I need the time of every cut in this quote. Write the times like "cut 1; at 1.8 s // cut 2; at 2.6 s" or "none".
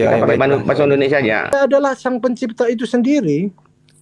cut 1; at 1.5 s